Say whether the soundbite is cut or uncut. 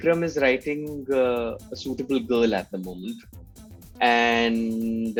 uncut